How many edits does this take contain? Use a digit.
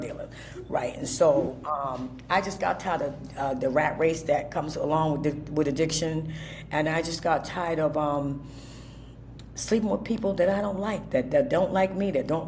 0